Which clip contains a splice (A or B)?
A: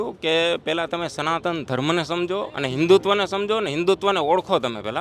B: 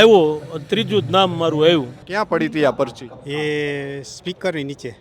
B